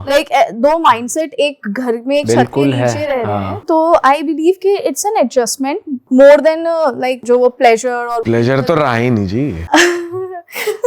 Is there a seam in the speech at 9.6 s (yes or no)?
yes